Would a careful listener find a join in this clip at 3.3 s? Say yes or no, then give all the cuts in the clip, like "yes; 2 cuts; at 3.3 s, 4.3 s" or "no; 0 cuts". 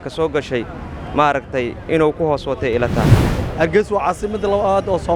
yes; 1 cut; at 3.3 s